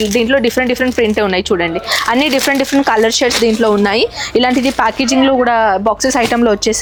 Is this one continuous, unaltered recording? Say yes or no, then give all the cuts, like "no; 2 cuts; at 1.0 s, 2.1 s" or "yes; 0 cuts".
yes; 0 cuts